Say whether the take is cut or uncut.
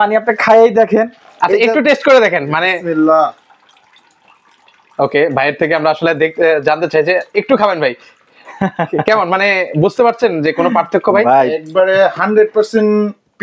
uncut